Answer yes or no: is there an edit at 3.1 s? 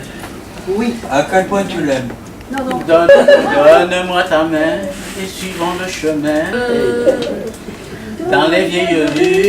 yes